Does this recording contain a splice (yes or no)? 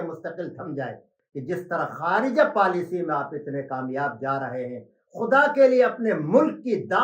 yes